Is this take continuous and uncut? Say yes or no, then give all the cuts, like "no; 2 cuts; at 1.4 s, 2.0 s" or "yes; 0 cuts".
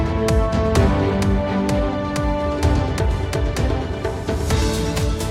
yes; 0 cuts